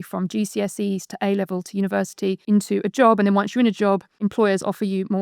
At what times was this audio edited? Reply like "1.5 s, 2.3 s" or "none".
2.5 s, 4.3 s